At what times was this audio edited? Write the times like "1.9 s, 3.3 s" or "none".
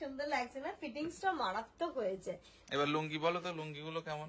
2.5 s